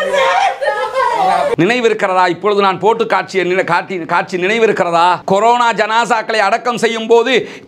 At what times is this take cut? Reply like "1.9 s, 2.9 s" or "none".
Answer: none